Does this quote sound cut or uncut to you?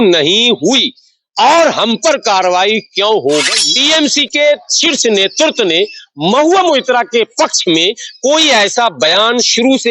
cut